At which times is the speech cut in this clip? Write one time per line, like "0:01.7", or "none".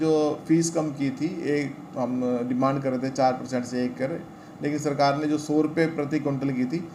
none